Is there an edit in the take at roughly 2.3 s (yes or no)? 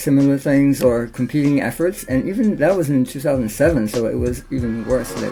no